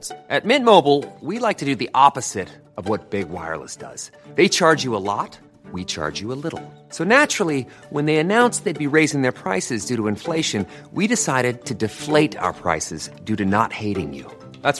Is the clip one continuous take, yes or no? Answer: yes